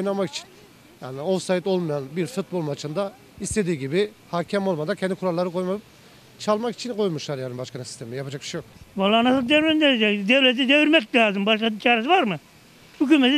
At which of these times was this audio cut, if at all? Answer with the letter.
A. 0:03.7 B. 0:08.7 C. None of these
B